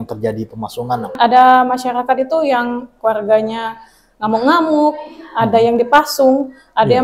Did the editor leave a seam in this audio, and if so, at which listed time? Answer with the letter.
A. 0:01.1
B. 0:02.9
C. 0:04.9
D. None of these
A